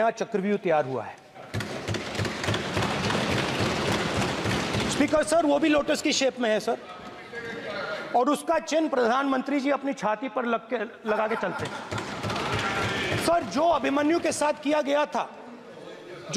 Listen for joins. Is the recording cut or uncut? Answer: uncut